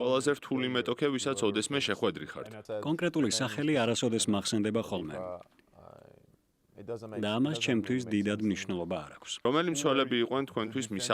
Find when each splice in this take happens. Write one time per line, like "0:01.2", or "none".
0:02.6
0:09.2